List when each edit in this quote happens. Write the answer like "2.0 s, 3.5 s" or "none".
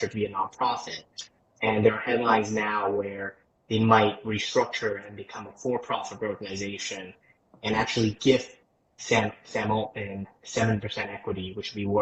none